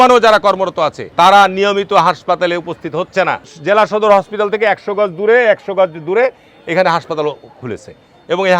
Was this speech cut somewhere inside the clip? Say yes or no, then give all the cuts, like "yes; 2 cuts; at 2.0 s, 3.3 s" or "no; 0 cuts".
yes; 2 cuts; at 1.0 s, 3.5 s